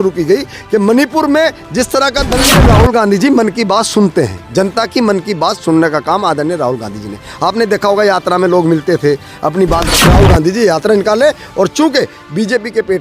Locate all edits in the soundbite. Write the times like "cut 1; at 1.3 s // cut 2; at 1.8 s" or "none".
cut 1; at 2.5 s // cut 2; at 9.9 s

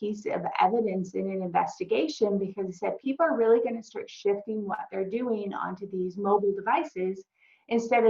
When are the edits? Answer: none

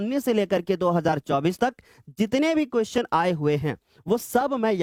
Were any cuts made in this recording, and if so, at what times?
none

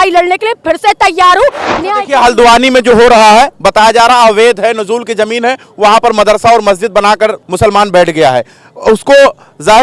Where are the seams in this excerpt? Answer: cut 1; at 1.6 s // cut 2; at 7.4 s

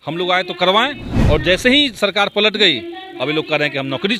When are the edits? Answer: none

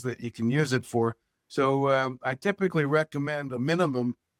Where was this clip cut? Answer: none

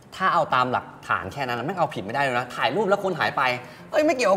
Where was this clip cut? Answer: none

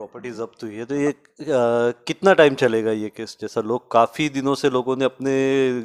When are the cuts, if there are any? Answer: none

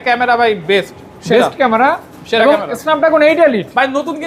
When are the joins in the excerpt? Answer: none

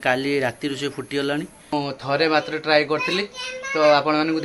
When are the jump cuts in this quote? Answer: cut 1; at 1.7 s

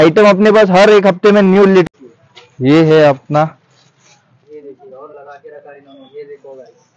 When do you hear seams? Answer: cut 1; at 1.8 s

